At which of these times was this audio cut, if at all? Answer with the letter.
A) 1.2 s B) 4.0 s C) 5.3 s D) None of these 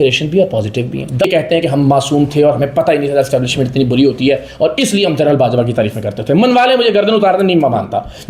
A